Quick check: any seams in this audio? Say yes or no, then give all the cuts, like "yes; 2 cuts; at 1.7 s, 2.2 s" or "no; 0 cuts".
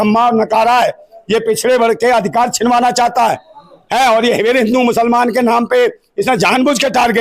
no; 0 cuts